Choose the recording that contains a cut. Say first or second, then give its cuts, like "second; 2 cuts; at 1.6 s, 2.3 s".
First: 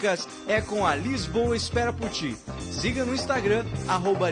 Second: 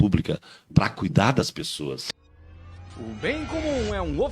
second; 1 cut; at 2.1 s